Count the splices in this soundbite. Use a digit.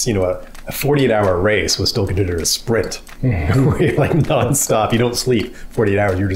0